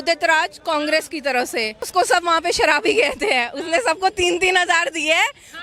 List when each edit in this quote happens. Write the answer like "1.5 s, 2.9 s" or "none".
1.9 s